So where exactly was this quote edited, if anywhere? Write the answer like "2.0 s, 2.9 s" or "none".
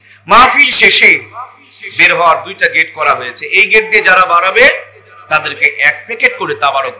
none